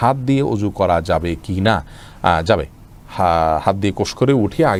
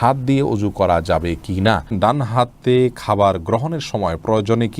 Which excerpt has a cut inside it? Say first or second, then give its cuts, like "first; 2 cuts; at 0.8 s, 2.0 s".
second; 1 cut; at 1.9 s